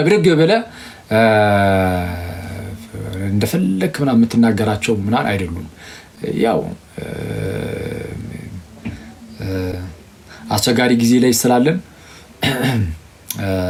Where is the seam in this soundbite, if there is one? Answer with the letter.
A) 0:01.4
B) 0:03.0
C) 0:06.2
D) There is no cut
D